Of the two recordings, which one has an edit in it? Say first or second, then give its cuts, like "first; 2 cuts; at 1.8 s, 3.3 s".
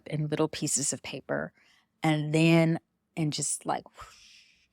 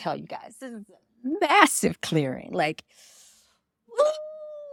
first; 1 cut; at 3.1 s